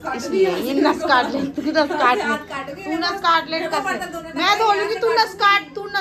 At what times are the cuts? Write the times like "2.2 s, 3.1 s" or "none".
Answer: none